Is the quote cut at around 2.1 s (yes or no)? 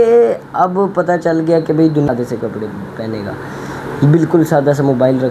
yes